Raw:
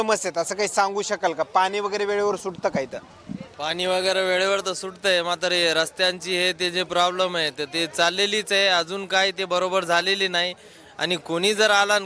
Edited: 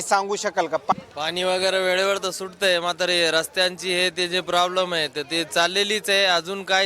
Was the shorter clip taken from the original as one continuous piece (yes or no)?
no